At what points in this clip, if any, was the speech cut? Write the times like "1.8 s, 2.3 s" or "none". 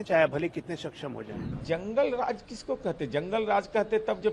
1.6 s